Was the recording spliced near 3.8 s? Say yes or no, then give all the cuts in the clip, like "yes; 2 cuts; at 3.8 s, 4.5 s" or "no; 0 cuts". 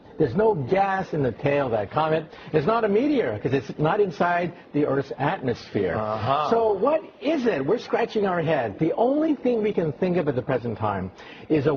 no; 1 cut; at 10.2 s